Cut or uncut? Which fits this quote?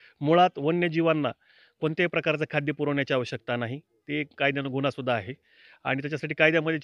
uncut